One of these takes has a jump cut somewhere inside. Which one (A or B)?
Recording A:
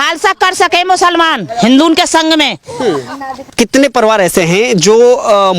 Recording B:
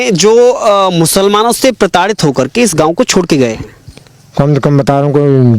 A